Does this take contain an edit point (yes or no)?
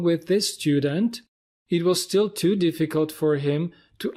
no